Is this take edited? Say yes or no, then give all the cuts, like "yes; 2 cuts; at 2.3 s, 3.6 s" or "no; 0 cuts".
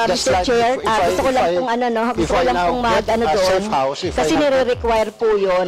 no; 0 cuts